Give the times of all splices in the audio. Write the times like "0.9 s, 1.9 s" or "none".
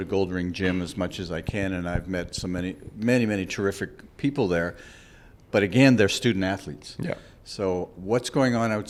none